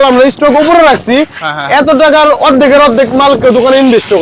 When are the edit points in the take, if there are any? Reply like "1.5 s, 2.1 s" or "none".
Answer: none